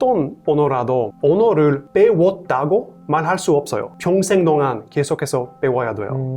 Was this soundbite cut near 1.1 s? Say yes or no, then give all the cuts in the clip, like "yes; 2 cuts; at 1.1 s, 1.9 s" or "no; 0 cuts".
yes; 1 cut; at 1.1 s